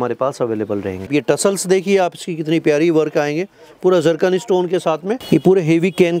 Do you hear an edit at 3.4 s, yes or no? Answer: no